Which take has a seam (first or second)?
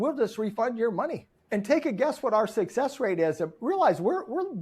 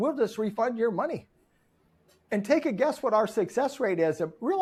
first